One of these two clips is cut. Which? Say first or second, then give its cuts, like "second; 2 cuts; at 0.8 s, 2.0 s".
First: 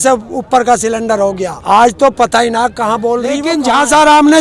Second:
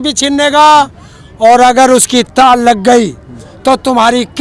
first; 2 cuts; at 1.5 s, 3.5 s